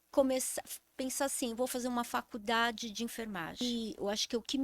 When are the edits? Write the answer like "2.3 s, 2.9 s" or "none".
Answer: 3.6 s